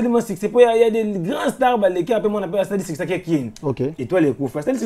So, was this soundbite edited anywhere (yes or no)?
no